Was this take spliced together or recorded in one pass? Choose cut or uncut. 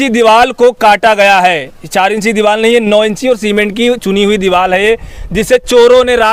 uncut